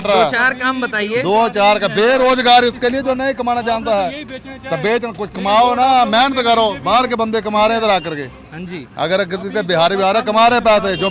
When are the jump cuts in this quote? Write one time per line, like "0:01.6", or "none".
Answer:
none